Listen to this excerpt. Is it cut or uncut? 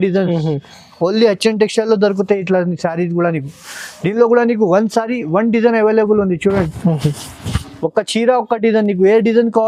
uncut